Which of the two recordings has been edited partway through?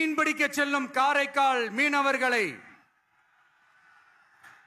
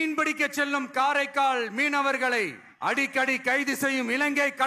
second; 1 cut; at 2.6 s

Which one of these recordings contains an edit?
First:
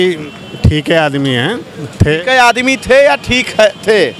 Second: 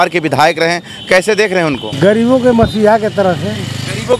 second; 1 cut; at 1.9 s

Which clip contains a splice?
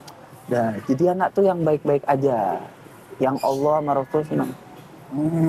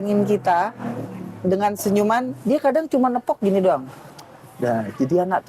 second; 1 cut; at 2.3 s

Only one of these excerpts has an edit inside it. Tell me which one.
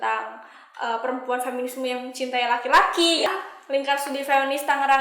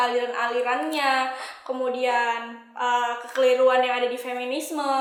first; 1 cut; at 3.3 s

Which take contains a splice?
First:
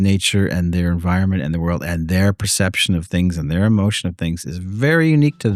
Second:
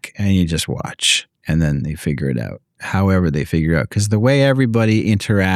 second; 2 cuts; at 1.1 s, 2.8 s

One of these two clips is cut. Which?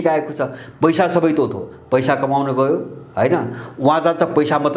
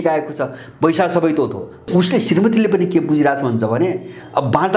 second; 1 cut; at 1.8 s

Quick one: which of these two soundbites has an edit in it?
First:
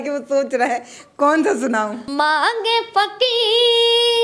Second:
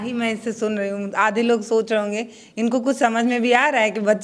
first; 1 cut; at 2.0 s

